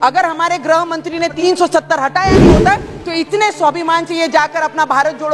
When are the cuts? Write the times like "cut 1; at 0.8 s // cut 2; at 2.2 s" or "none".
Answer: cut 1; at 1.4 s